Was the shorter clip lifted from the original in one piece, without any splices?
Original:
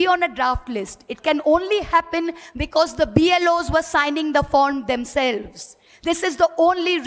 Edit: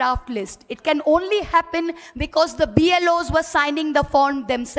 yes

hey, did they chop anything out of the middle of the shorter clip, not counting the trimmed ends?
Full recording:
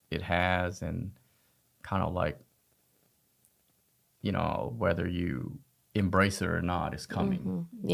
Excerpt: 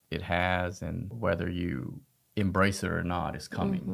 yes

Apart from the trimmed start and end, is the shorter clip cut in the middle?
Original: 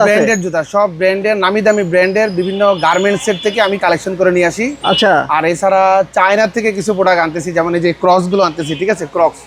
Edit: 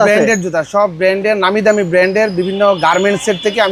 no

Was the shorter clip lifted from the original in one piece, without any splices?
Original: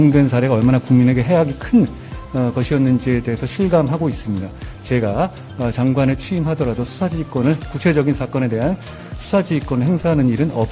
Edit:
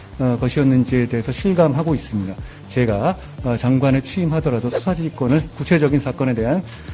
yes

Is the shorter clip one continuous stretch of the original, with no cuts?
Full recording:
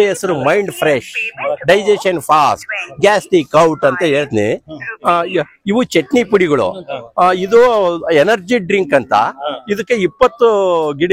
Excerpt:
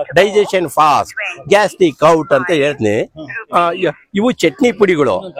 yes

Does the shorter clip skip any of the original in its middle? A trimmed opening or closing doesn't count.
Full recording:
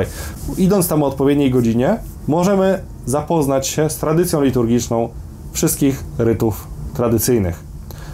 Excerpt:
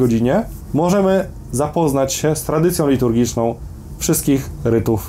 no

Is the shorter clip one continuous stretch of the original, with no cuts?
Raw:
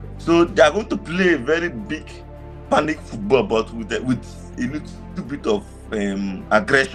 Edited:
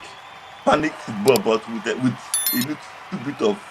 yes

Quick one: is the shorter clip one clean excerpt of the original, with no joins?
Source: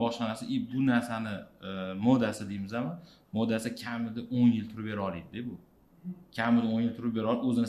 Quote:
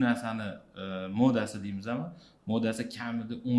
yes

